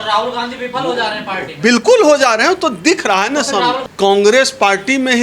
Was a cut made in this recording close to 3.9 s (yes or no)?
yes